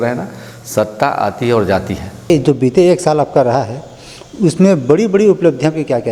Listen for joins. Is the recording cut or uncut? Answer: cut